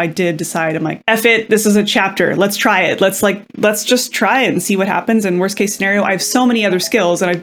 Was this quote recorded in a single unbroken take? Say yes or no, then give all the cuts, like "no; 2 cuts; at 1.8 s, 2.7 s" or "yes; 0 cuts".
no; 1 cut; at 1.0 s